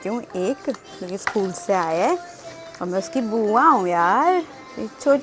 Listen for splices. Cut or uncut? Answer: uncut